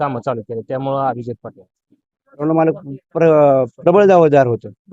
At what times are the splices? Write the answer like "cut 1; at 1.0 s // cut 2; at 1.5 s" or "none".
cut 1; at 2.4 s